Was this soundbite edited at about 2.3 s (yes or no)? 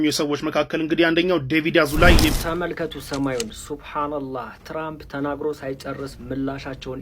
yes